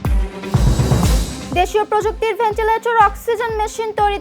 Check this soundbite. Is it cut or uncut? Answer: cut